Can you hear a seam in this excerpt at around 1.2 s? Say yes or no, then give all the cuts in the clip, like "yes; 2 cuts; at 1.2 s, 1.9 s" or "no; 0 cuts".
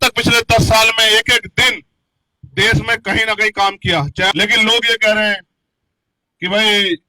no; 1 cut; at 4.3 s